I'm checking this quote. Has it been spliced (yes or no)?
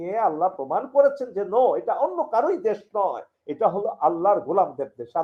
no